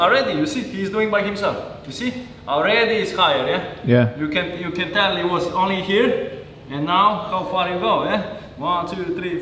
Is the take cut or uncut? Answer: uncut